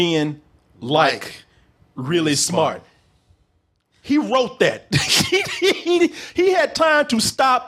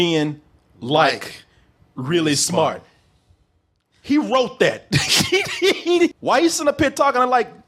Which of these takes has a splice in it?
second; 1 cut; at 6.2 s

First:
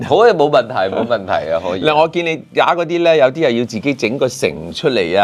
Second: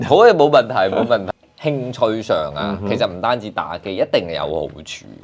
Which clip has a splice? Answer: second; 1 cut; at 1.2 s

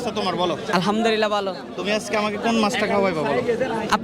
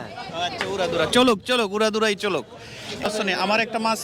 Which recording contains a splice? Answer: second; 1 cut; at 3.0 s

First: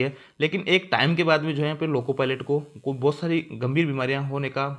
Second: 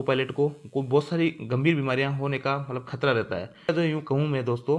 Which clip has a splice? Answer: second; 1 cut; at 3.7 s

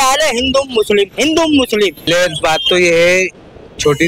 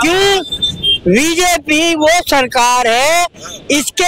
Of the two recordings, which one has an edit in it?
first; 1 cut; at 2.1 s

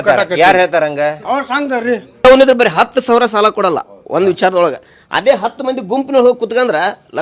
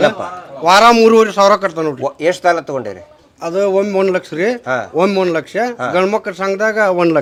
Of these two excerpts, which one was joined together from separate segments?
first; 1 cut; at 2.2 s

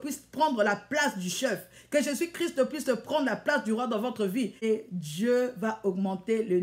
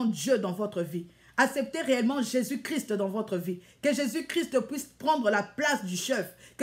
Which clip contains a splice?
first; 1 cut; at 4.6 s

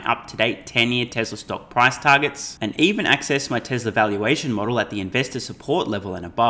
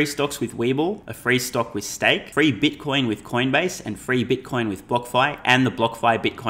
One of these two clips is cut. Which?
second; 2 cuts; at 1.1 s, 2.3 s

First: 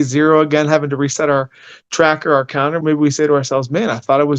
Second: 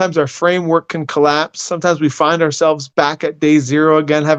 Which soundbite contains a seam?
first; 1 cut; at 2.8 s

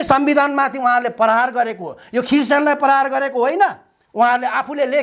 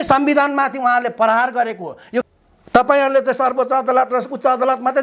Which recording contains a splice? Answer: second; 1 cut; at 2.3 s

